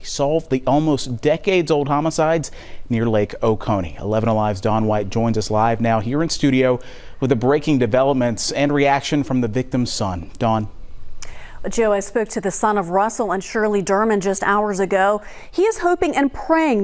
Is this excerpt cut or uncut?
uncut